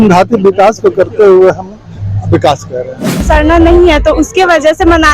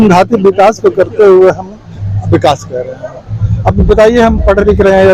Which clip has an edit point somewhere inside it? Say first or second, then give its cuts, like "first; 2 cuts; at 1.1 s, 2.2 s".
first; 1 cut; at 3.2 s